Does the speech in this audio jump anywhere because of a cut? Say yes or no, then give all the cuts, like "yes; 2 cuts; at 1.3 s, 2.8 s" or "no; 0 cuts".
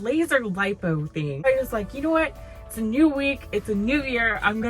yes; 1 cut; at 1.4 s